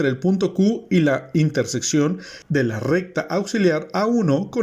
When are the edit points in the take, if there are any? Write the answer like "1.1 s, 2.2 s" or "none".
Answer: 2.3 s